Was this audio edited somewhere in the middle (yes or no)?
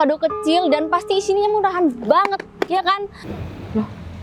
yes